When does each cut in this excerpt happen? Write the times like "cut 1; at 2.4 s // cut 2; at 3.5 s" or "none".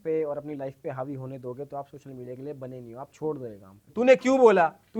cut 1; at 3.9 s